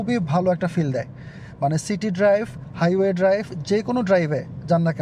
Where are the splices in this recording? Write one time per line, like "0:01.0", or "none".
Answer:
none

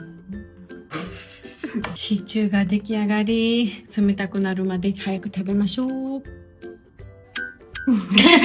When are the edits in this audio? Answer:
none

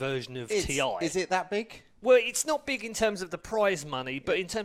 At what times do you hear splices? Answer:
none

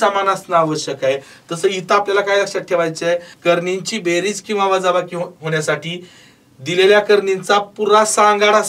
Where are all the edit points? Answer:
0:03.3

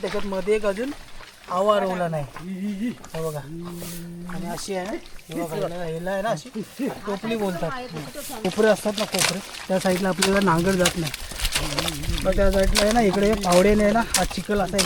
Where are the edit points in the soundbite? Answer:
none

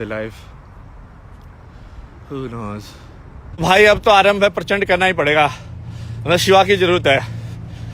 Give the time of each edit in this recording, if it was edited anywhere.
0:03.6

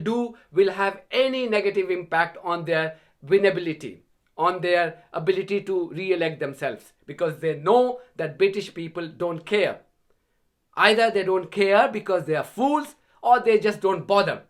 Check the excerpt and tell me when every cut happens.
none

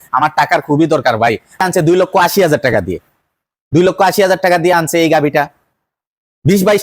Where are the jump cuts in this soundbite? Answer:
0:01.6

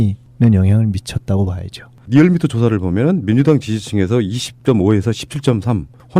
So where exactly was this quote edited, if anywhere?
0:02.2

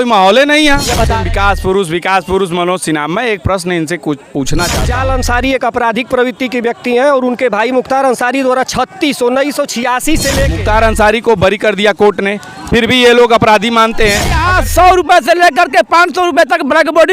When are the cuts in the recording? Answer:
0:01.1
0:04.9
0:10.5
0:14.4

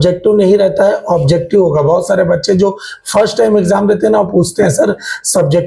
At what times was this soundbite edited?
none

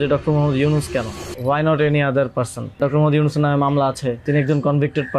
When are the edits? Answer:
0:01.2
0:02.8
0:04.2

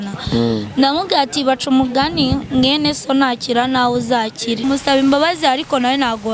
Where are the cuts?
0:04.6

